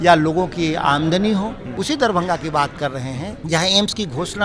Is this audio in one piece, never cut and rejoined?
no; 2 cuts; at 1.7 s, 3.4 s

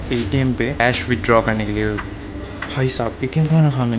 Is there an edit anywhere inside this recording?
yes; 2 cuts; at 0.8 s, 2.0 s

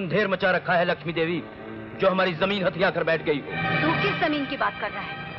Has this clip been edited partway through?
no; 0 cuts

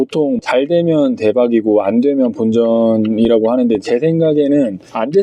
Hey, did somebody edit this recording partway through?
no; 0 cuts

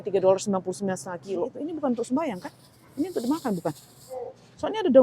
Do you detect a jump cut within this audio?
yes; 1 cut; at 1.6 s

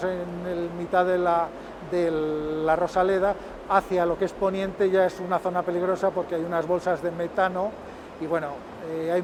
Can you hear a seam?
no; 0 cuts

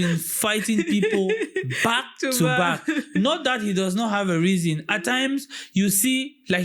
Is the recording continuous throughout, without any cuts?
yes; 0 cuts

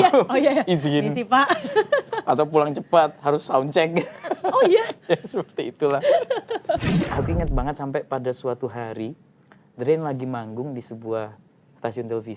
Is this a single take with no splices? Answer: no; 1 cut; at 7.0 s

